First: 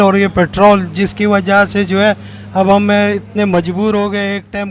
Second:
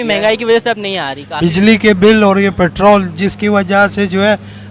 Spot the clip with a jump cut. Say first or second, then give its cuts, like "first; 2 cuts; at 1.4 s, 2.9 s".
second; 1 cut; at 1.2 s